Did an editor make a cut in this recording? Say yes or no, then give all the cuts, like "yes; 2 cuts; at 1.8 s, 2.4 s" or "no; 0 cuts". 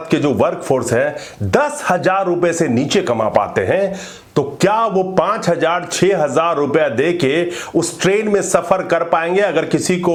no; 0 cuts